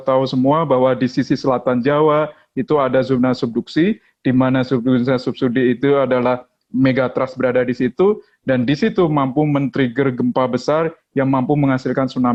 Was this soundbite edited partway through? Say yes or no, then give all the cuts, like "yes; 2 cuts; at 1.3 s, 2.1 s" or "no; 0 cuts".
no; 0 cuts